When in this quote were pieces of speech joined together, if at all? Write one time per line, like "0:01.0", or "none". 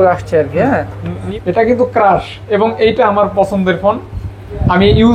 0:01.2